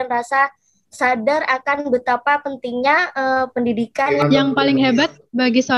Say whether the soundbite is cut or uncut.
cut